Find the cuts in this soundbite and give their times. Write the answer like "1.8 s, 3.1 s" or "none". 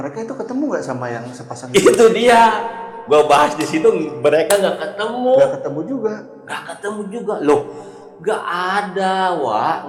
none